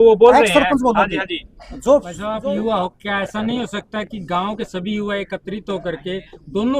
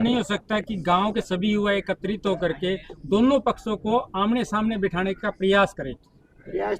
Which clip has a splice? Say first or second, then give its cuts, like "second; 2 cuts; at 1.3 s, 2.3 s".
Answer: first; 1 cut; at 2.2 s